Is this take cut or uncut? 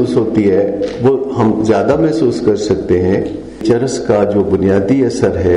cut